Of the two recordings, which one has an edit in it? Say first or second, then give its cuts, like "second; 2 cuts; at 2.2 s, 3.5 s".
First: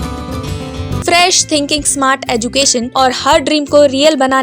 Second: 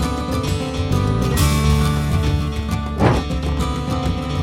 first; 2 cuts; at 1.0 s, 2.9 s